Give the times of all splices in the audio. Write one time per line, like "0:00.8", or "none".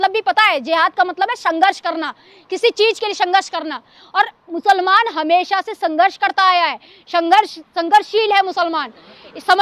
none

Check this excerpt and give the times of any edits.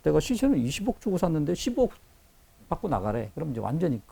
none

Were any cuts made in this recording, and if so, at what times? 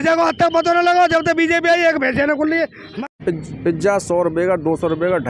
0:03.2

